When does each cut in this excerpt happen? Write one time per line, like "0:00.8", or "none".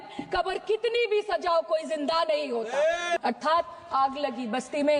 0:03.2